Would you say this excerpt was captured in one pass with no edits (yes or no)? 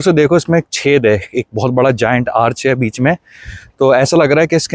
yes